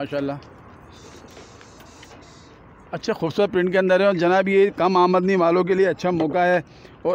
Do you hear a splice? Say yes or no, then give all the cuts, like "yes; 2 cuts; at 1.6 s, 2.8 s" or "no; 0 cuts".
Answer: no; 0 cuts